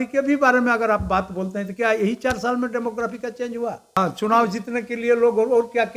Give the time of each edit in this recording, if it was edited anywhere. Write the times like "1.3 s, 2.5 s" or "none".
4.0 s